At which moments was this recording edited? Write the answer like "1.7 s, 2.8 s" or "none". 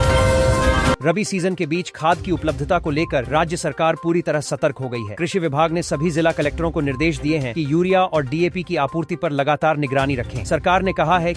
1.0 s